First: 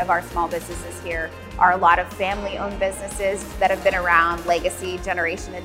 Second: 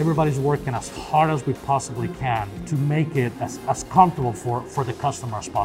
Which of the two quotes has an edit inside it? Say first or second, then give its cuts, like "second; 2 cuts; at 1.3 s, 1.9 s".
second; 2 cuts; at 2.6 s, 3.3 s